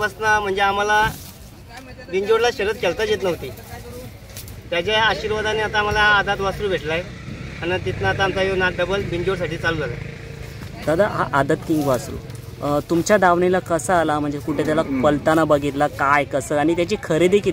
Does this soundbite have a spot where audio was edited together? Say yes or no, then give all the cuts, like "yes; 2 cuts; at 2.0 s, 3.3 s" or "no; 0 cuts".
no; 0 cuts